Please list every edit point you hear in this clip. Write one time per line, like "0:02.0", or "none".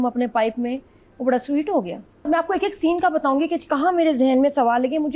0:02.3